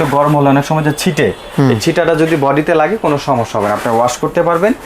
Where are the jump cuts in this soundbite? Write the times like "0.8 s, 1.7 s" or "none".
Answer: none